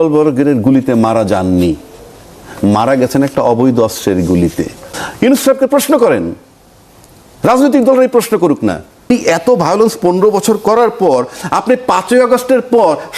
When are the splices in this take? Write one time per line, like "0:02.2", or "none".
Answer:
0:05.0
0:09.1